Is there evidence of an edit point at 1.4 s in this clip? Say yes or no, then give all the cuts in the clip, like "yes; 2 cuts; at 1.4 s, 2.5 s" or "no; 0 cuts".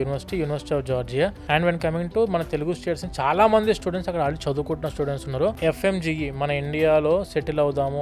yes; 2 cuts; at 1.4 s, 5.6 s